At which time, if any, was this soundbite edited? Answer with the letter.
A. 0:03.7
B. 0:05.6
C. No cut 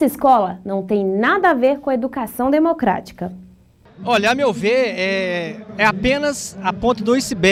C